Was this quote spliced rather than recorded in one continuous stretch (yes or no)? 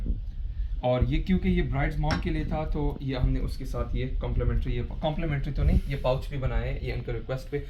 no